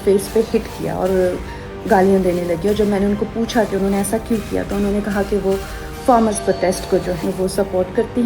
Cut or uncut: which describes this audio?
cut